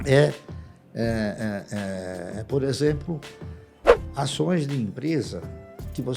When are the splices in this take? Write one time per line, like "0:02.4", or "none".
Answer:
none